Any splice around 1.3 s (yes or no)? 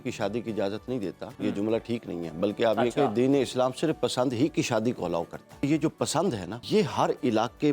yes